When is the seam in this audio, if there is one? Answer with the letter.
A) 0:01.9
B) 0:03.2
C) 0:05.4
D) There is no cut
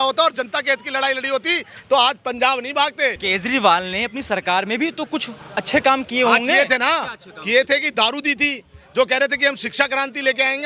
B